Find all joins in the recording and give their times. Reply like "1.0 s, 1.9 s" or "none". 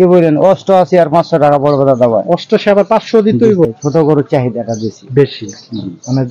3.7 s